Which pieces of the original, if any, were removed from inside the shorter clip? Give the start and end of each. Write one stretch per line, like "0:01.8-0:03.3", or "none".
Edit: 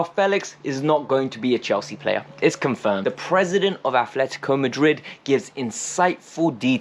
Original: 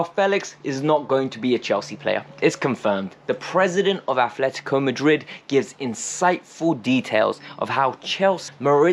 0:03.0-0:03.2

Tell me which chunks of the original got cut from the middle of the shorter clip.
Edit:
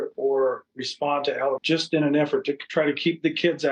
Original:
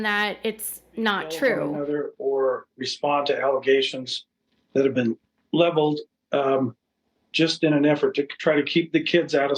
0:03.6-0:07.3

